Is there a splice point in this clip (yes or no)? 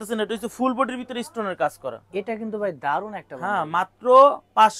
no